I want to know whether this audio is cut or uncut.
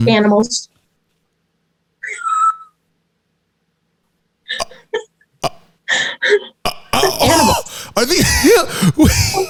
uncut